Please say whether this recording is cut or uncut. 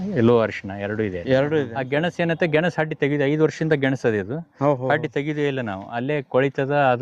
cut